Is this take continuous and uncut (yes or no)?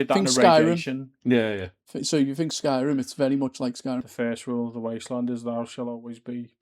no